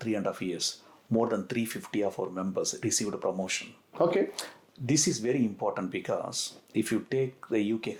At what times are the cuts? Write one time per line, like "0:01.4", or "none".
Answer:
none